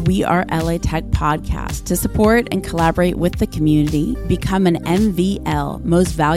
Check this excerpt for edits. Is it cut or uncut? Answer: uncut